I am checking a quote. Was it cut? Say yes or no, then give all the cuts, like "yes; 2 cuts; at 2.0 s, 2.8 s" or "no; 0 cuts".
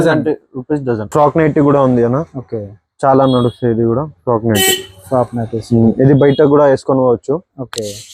yes; 1 cut; at 1.1 s